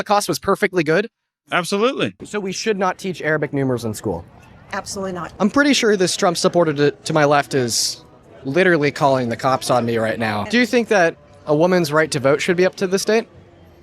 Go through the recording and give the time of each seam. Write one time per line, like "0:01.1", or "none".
0:02.2
0:05.2
0:10.5